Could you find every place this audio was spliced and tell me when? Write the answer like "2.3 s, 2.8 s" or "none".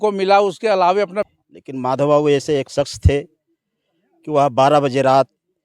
1.3 s